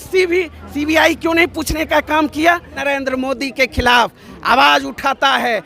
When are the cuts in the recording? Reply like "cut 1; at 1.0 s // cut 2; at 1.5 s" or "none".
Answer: cut 1; at 2.7 s